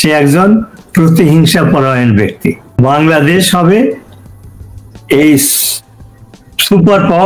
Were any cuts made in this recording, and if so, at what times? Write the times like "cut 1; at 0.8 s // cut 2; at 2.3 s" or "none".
cut 1; at 2.6 s